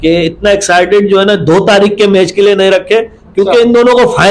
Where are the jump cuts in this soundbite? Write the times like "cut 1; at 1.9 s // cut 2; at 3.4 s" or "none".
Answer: none